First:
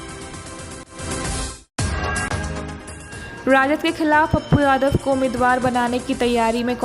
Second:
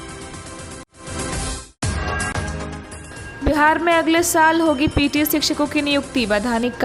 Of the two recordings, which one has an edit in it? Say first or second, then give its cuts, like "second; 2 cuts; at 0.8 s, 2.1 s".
first; 2 cuts; at 0.9 s, 2.7 s